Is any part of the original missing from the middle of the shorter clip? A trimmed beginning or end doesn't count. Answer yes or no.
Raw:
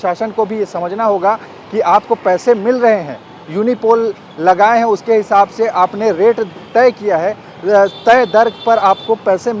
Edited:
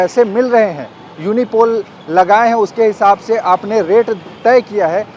no